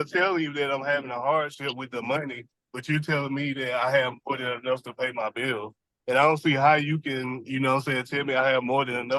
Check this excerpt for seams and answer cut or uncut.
uncut